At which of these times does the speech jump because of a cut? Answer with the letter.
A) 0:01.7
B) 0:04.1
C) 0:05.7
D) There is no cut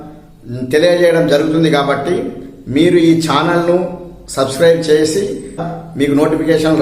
C